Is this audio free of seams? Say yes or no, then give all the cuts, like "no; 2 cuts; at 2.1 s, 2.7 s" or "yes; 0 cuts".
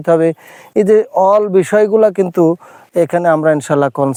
yes; 0 cuts